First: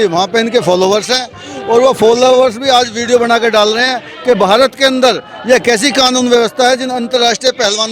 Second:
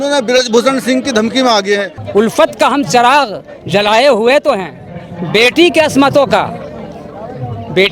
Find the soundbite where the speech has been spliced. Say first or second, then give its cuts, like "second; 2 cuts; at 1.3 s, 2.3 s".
second; 1 cut; at 1.9 s